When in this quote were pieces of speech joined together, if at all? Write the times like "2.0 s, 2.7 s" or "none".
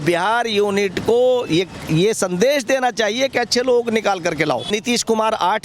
4.7 s